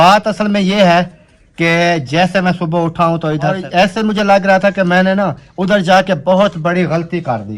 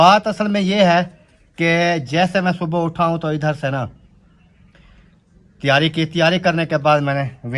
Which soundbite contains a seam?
first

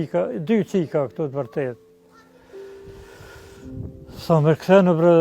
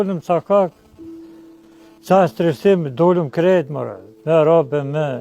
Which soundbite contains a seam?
first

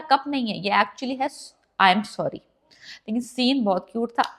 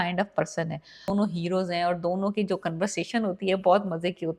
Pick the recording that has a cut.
second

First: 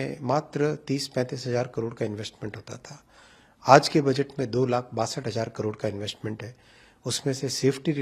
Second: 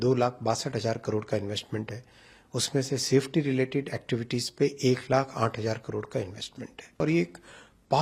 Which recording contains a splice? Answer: second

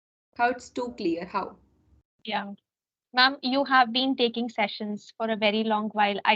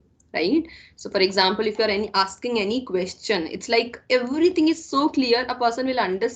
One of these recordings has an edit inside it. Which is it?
first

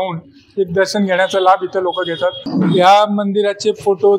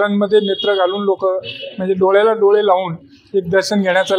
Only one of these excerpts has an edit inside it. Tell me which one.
first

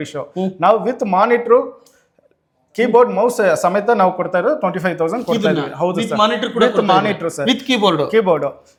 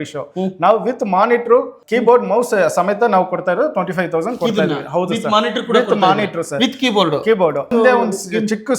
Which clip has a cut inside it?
second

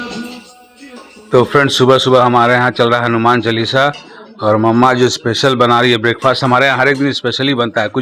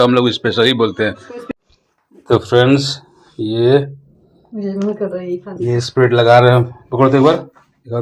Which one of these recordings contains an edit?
second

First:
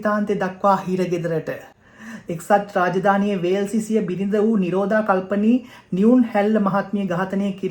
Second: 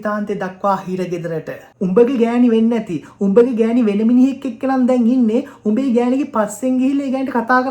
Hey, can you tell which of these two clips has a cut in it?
second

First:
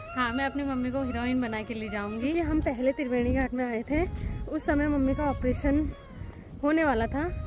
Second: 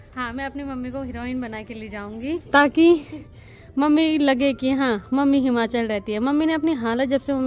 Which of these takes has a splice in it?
first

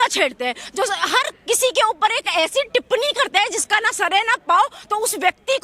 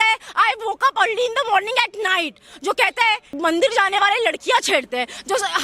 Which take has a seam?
second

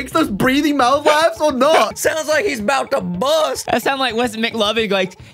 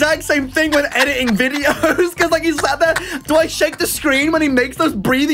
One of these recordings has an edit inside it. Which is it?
first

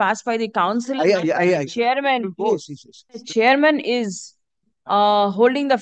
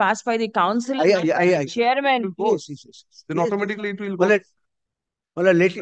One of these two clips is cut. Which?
first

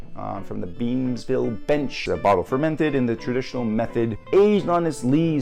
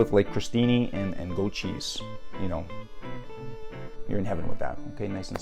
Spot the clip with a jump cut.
first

